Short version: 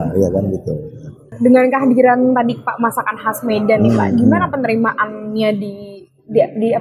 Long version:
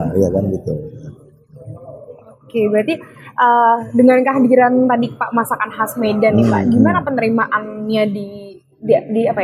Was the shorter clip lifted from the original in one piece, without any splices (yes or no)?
no